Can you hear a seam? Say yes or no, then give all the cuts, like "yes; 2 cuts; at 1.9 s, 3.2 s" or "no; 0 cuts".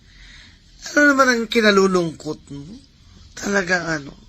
yes; 1 cut; at 2.4 s